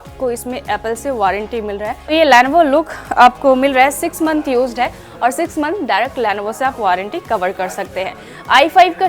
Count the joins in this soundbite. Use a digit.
1